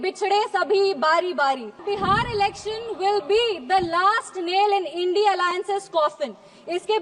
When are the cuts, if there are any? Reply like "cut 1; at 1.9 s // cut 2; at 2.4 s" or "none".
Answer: cut 1; at 1.8 s

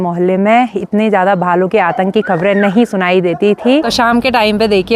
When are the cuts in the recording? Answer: cut 1; at 3.9 s

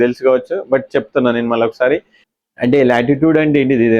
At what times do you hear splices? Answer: cut 1; at 2.1 s

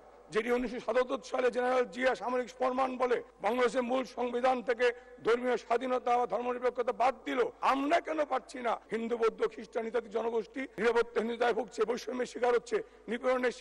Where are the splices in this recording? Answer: cut 1; at 3.3 s // cut 2; at 7.5 s // cut 3; at 8.8 s // cut 4; at 10.6 s

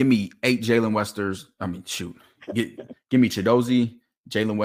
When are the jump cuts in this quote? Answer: none

